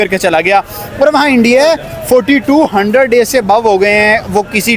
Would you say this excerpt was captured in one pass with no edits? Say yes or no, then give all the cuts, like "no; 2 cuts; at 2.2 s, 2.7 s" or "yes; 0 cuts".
yes; 0 cuts